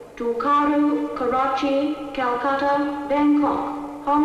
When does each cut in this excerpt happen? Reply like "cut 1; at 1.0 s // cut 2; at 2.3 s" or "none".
cut 1; at 1.5 s